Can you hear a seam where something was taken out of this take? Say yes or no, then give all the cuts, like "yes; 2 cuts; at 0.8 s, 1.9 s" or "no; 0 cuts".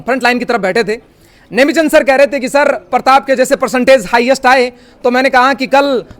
no; 0 cuts